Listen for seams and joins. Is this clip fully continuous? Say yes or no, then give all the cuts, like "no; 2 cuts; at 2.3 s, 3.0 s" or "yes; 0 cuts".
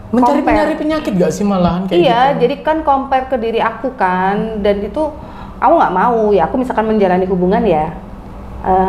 yes; 0 cuts